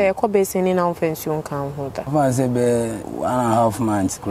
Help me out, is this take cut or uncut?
cut